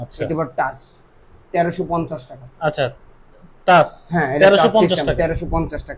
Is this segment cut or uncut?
uncut